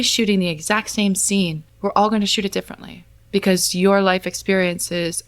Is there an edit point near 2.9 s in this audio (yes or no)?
no